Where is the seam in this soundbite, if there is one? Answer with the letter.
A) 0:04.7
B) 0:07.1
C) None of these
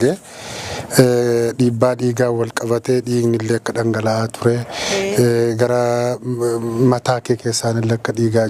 C